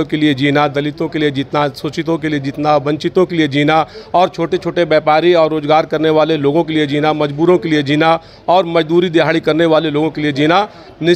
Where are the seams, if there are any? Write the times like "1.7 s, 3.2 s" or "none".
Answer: none